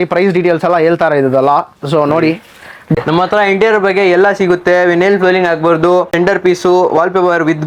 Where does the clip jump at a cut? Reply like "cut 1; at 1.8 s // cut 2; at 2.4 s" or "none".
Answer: cut 1; at 2.9 s // cut 2; at 6.1 s